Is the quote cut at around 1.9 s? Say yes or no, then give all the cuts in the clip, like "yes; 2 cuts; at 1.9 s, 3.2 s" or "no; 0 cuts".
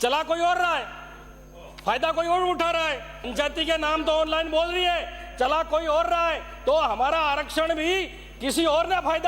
no; 1 cut; at 3.3 s